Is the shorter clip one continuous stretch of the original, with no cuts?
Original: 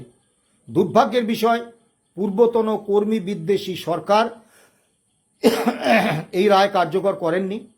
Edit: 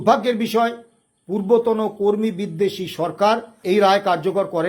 no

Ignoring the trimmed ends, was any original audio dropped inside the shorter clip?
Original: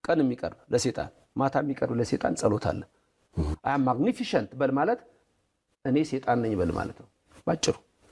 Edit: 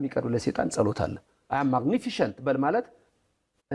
yes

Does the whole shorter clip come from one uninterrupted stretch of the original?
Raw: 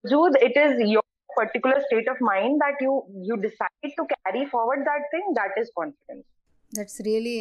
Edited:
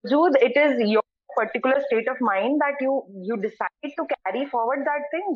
yes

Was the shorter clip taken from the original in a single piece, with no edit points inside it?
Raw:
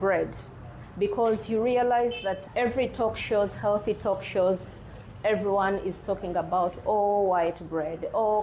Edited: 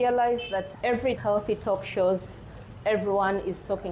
no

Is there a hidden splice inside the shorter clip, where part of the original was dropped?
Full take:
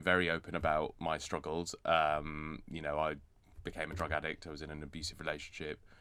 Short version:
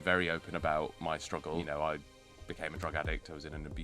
yes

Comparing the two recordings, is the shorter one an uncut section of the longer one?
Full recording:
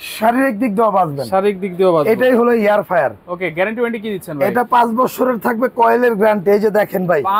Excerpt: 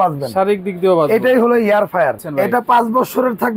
no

